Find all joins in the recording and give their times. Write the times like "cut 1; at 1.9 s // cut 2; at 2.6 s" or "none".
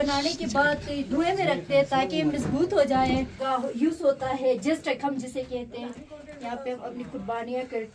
cut 1; at 3.3 s